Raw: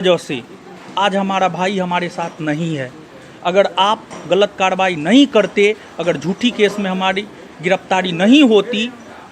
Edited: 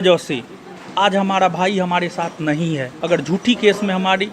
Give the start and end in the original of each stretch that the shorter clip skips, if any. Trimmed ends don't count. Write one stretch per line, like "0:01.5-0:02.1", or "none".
0:02.9-0:05.9